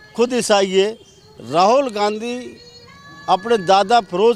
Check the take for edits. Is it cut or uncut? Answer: uncut